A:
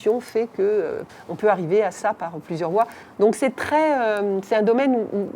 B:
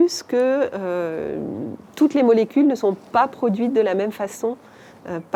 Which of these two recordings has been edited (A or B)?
A